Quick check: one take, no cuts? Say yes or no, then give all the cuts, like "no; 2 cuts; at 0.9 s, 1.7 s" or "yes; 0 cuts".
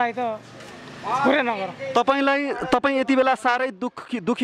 yes; 0 cuts